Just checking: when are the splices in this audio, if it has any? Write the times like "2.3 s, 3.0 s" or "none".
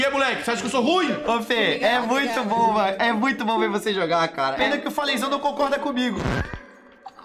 1.2 s